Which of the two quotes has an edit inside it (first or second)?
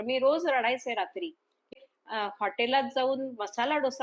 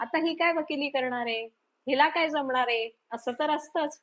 first